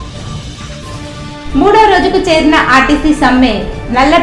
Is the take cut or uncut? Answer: uncut